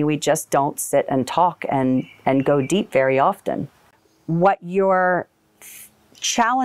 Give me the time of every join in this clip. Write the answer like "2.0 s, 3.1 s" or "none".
3.8 s